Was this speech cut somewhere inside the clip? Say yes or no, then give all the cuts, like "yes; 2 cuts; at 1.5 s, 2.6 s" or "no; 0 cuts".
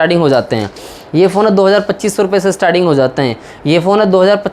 no; 0 cuts